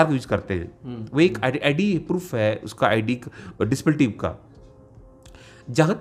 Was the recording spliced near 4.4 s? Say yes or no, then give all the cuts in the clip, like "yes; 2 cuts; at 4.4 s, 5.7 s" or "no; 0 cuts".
no; 0 cuts